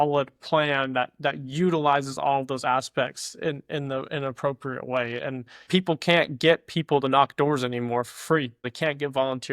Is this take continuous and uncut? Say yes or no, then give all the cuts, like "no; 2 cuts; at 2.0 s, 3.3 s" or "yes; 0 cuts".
no; 2 cuts; at 5.6 s, 8.6 s